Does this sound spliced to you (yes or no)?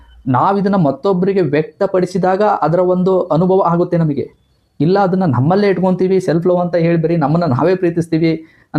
no